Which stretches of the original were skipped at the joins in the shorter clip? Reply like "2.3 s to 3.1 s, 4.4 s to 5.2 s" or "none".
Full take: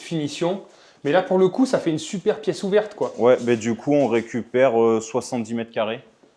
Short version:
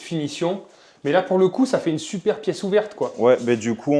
none